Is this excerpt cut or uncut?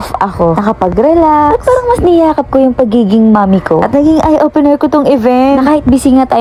uncut